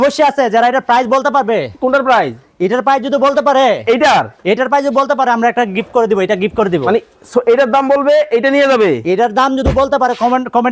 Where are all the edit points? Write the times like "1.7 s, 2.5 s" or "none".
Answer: none

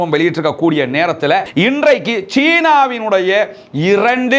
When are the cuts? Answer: 1.5 s

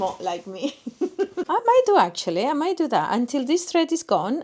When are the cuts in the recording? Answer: 1.5 s

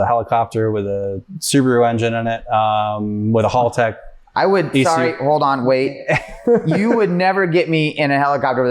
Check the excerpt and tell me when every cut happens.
none

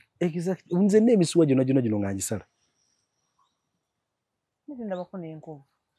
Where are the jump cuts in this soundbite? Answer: none

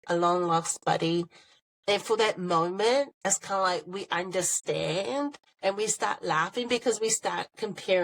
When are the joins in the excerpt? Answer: 3.1 s, 5.5 s

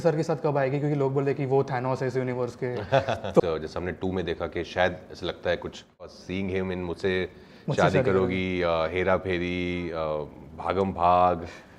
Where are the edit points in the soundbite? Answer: 3.4 s, 6.2 s

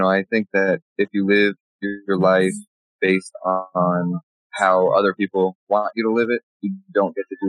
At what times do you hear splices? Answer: none

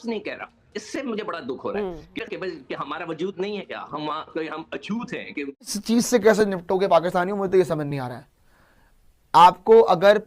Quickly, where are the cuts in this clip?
2.2 s, 5.7 s

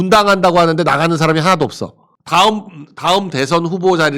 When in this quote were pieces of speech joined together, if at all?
2.2 s

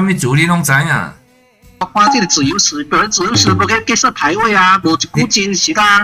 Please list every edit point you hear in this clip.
1.8 s

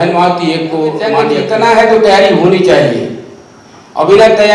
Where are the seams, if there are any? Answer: 1.3 s

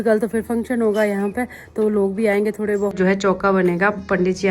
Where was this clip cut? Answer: 2.9 s

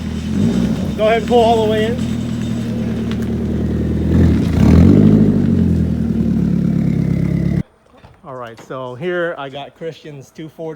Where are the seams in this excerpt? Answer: 7.7 s

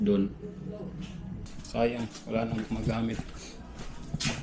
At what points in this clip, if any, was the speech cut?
1.5 s

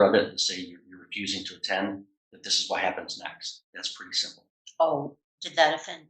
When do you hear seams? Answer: 3.6 s

